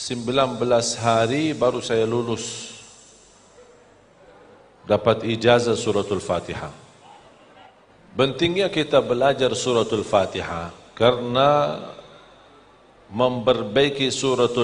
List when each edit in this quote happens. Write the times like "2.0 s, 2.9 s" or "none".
7.9 s